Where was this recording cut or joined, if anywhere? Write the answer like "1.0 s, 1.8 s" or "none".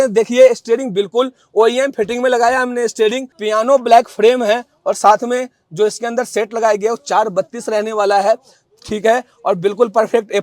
3.3 s